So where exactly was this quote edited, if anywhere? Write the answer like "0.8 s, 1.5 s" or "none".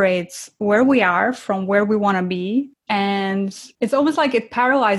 2.8 s, 3.6 s